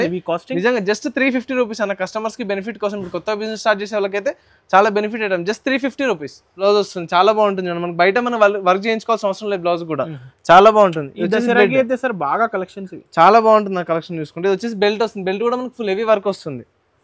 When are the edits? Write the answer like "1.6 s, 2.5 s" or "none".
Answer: 6.6 s